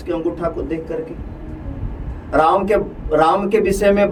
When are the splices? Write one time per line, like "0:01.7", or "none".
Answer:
none